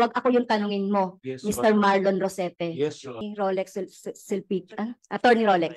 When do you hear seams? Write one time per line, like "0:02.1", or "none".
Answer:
0:03.3